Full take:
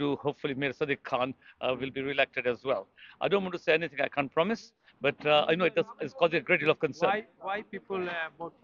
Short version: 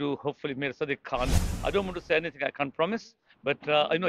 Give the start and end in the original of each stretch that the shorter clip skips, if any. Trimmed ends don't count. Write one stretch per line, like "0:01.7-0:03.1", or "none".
0:01.4-0:03.0